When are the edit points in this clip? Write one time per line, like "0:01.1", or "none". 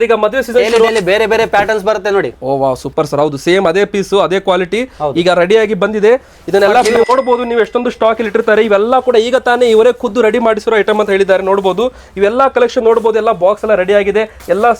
0:00.9
0:06.9